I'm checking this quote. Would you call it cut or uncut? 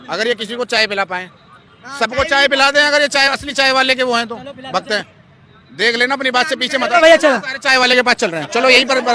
uncut